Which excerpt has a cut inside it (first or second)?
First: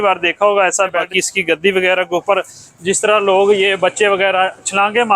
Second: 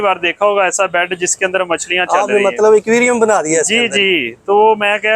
first